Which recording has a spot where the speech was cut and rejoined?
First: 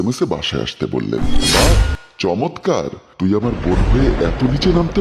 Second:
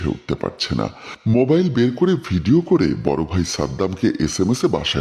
first; 1 cut; at 1.6 s

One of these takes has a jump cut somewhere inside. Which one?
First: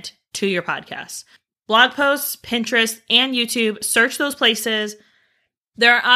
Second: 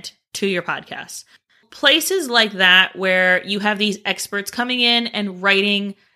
second; 1 cut; at 1.6 s

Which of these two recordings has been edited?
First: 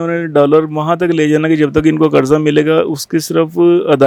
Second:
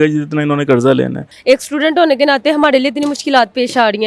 second; 1 cut; at 1.3 s

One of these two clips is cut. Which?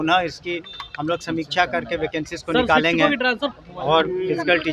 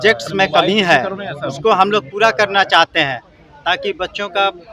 first; 1 cut; at 3.5 s

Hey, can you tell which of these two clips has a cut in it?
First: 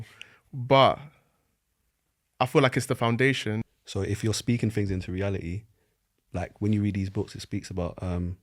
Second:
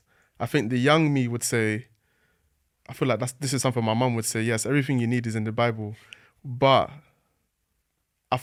first; 1 cut; at 3.7 s

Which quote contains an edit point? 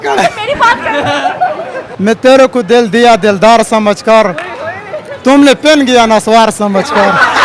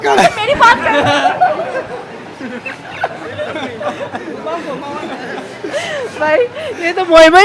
first; 1 cut; at 1.8 s

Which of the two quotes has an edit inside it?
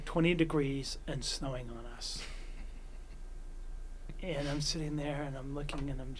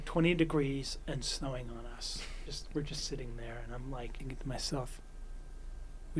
second; 2 cuts; at 2.5 s, 4.2 s

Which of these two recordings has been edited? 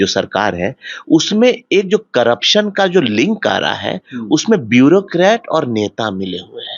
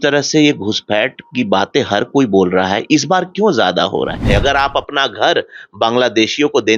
second; 1 cut; at 4.2 s

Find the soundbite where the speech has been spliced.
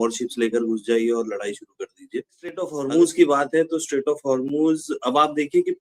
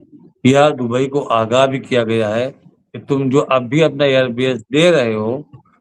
first; 1 cut; at 2.8 s

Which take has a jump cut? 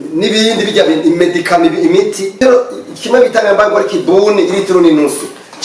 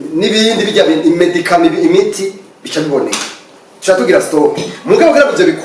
first; 1 cut; at 2.4 s

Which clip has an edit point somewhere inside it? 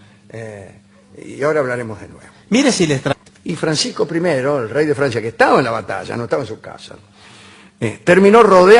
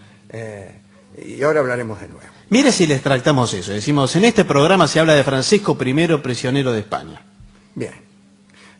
second; 1 cut; at 3.1 s

